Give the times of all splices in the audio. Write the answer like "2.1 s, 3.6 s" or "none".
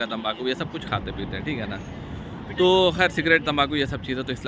none